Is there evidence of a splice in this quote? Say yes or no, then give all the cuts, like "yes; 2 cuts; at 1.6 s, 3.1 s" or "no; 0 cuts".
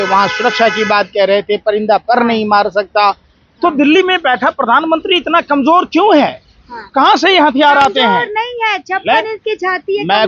no; 0 cuts